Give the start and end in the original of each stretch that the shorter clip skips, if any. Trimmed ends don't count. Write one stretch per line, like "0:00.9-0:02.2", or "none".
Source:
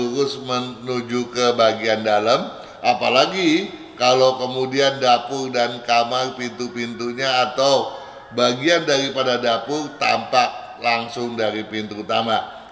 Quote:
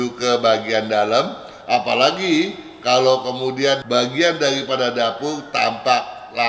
0:05.0-0:08.3